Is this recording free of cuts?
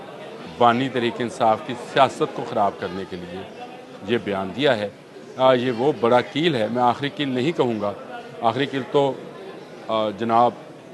yes; 0 cuts

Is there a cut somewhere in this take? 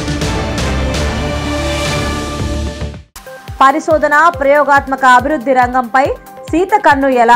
yes; 1 cut; at 3.0 s

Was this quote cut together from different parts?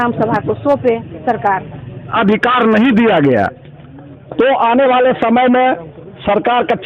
yes; 1 cut; at 2.1 s

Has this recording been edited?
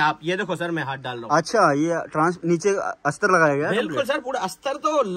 no; 0 cuts

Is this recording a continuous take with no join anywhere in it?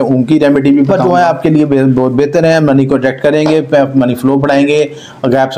no; 1 cut; at 0.9 s

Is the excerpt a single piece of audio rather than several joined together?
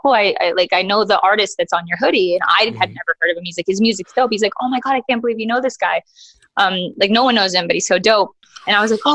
yes; 0 cuts

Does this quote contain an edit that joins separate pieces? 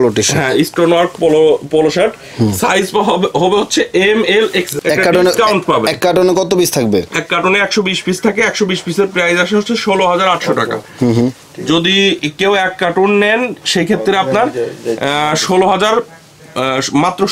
yes; 1 cut; at 4.7 s

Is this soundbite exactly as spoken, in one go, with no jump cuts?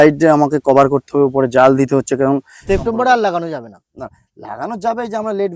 no; 1 cut; at 2.5 s

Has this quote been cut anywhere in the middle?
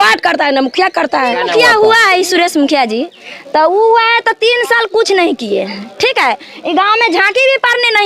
yes; 1 cut; at 1.3 s

